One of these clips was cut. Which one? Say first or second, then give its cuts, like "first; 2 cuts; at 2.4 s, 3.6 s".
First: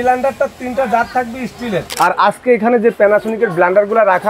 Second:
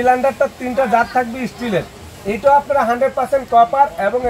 first; 1 cut; at 1.9 s